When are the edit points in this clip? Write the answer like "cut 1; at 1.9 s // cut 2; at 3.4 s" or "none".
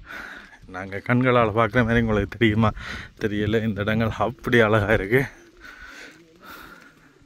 none